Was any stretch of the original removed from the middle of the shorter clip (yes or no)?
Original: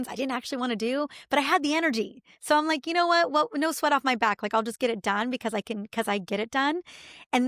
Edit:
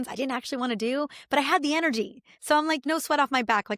yes